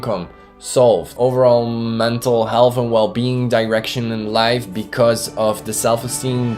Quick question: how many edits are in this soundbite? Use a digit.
1